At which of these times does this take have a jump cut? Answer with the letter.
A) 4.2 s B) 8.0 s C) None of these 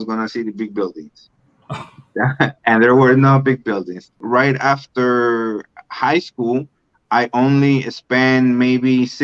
A